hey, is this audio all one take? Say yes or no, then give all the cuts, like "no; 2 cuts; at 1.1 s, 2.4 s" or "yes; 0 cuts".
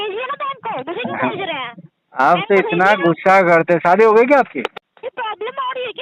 no; 1 cut; at 4.9 s